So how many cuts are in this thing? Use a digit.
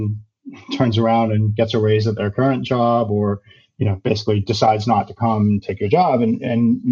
0